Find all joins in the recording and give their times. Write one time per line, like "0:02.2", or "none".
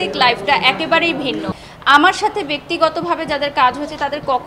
0:01.7